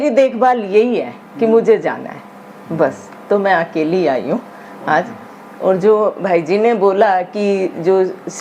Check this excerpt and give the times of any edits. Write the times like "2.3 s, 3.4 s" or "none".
none